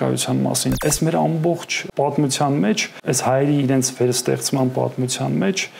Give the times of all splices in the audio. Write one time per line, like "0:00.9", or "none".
0:00.8
0:01.8
0:02.9